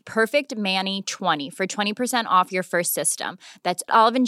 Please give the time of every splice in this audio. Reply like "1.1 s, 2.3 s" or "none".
1.4 s